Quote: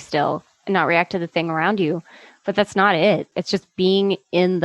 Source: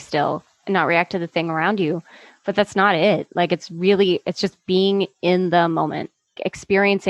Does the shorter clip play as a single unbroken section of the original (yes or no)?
no